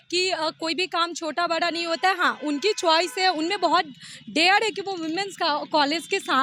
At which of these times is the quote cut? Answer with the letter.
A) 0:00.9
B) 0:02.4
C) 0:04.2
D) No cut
D